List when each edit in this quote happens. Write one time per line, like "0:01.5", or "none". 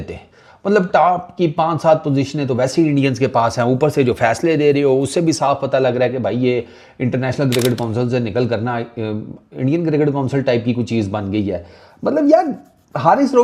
none